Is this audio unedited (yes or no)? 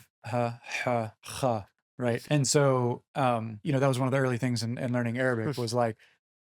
no